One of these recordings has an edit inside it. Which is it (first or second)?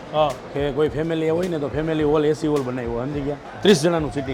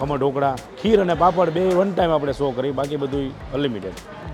first